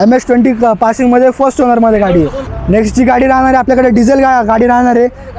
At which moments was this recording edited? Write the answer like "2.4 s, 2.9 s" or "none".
2.4 s